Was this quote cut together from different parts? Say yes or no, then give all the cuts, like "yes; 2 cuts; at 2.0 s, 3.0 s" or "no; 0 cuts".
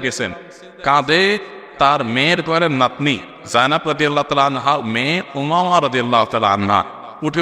no; 0 cuts